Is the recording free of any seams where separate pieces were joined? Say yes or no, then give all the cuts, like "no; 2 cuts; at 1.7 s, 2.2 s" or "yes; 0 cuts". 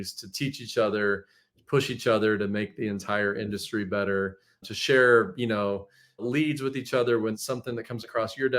no; 3 cuts; at 4.7 s, 6.2 s, 7.4 s